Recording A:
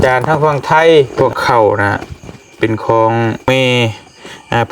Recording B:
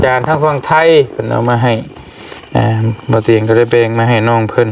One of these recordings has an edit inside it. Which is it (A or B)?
A